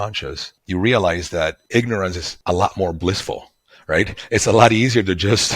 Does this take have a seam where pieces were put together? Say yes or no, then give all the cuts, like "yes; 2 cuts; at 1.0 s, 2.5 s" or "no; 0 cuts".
yes; 1 cut; at 2.3 s